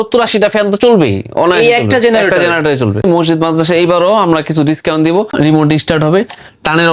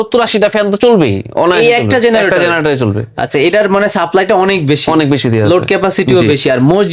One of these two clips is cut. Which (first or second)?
first